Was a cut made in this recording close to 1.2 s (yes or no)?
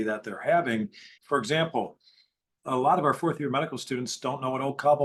no